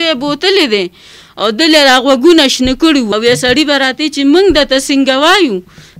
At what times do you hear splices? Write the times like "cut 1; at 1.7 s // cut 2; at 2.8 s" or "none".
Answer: cut 1; at 3.1 s